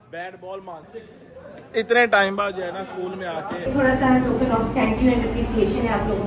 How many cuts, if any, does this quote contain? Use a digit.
2